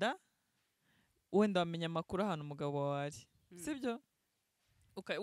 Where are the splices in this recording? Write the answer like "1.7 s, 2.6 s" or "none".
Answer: none